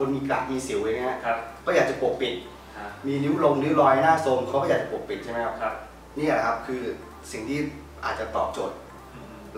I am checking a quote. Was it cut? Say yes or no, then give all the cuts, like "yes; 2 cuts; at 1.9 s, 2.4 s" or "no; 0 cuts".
no; 0 cuts